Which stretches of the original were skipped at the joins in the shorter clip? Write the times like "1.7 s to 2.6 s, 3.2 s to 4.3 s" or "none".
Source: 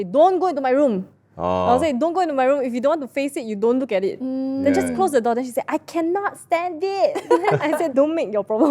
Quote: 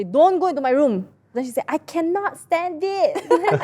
1.4 s to 5.4 s